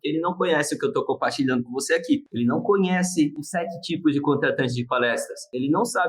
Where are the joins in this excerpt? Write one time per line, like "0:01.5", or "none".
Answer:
0:03.4